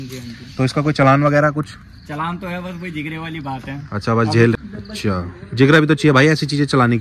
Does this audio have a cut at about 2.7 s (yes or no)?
no